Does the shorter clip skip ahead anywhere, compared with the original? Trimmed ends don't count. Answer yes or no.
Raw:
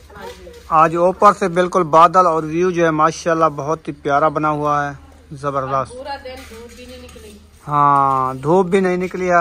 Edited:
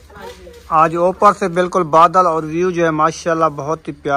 no